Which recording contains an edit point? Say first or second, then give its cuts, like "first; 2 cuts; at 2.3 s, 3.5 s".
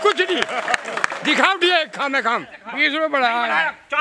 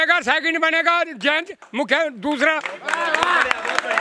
first; 1 cut; at 2.5 s